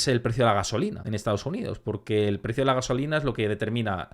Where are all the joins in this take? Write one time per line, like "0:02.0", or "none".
0:01.1